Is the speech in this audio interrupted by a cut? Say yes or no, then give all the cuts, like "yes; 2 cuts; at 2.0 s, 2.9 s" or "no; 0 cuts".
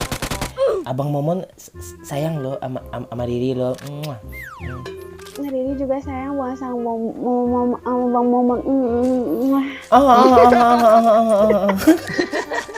no; 0 cuts